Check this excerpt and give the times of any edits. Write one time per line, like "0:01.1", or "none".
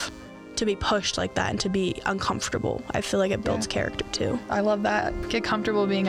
0:04.4
0:05.2